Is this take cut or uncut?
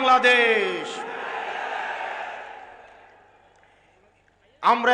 uncut